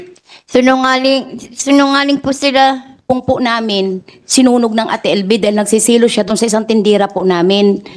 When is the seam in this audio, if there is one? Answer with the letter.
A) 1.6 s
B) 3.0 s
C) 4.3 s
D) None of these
B